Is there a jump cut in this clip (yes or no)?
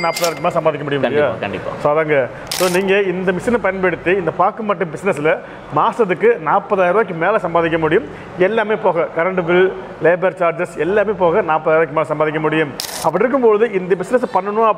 no